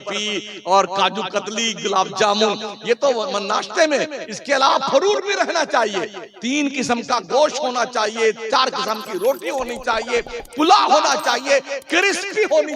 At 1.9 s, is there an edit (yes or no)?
no